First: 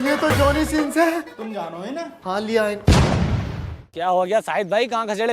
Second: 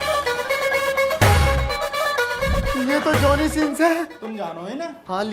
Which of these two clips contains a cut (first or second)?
first